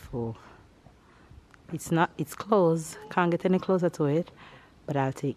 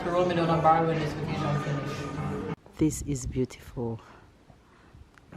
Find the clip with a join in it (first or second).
second